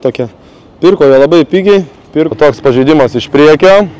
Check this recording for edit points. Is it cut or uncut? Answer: cut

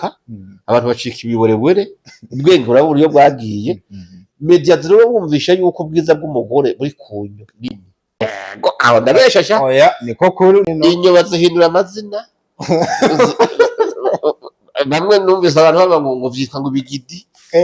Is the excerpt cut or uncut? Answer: cut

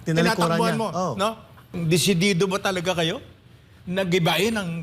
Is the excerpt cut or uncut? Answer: cut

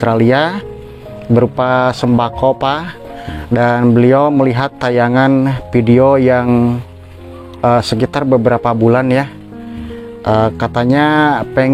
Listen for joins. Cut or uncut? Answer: uncut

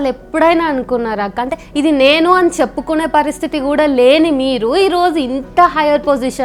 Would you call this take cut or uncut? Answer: uncut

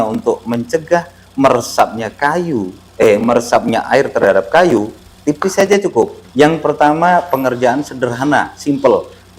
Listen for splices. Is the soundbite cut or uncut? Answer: cut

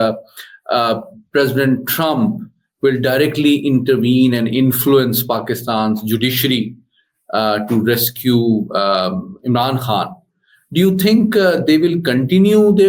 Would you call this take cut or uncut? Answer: uncut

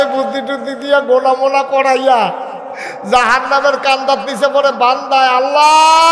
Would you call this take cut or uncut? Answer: uncut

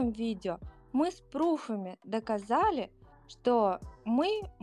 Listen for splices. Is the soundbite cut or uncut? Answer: uncut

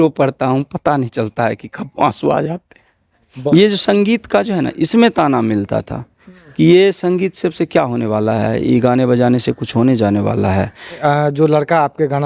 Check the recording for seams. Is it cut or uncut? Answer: cut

